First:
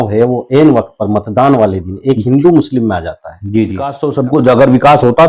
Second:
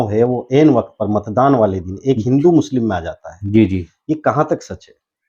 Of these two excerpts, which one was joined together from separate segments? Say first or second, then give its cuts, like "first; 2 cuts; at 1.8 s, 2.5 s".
first; 1 cut; at 4.0 s